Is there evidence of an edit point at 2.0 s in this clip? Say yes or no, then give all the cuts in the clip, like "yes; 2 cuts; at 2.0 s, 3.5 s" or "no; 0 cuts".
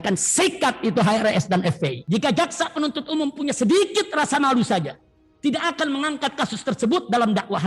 yes; 1 cut; at 2.0 s